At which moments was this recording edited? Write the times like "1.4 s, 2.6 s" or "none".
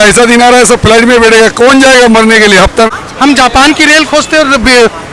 2.9 s